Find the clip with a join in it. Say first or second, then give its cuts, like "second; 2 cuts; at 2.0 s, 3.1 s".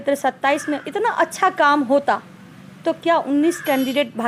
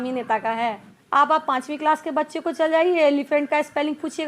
second; 1 cut; at 0.9 s